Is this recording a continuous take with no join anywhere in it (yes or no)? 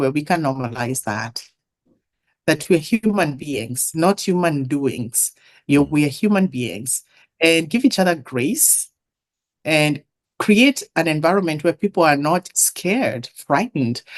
no